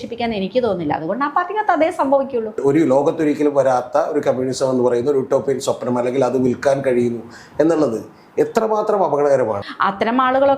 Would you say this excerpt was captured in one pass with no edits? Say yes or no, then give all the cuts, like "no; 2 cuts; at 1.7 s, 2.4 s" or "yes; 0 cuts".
no; 2 cuts; at 2.5 s, 9.6 s